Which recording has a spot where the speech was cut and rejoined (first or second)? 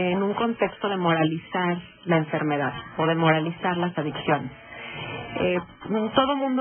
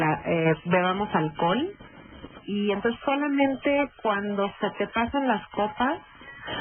second